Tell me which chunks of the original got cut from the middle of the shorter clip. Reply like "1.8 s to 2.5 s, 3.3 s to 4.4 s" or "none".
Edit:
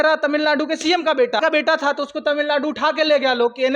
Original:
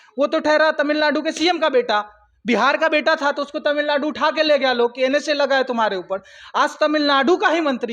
2.0 s to 2.8 s